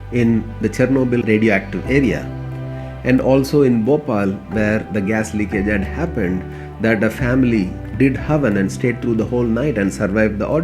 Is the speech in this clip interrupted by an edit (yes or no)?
no